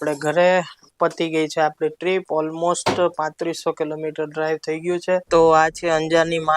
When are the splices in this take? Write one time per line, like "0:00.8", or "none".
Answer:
0:05.3